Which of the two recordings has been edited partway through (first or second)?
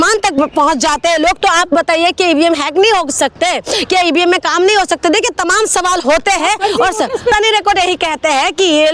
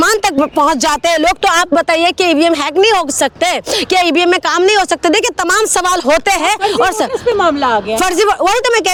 first